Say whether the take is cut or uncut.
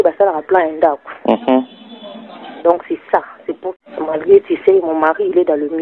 cut